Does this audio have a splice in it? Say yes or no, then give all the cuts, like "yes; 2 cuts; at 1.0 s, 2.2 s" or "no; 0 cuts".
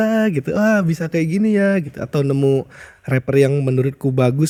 no; 0 cuts